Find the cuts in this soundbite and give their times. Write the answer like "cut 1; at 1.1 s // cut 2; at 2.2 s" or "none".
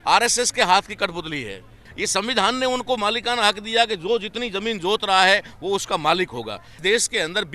cut 1; at 1.7 s // cut 2; at 6.7 s